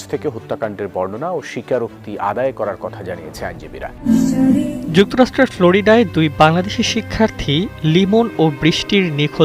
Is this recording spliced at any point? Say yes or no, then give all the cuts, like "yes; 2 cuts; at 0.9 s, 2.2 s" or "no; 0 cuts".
yes; 1 cut; at 4.0 s